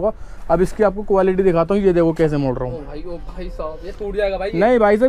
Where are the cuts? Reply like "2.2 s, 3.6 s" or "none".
none